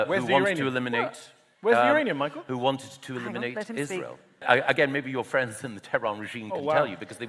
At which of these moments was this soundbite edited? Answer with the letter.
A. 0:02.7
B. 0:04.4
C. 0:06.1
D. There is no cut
B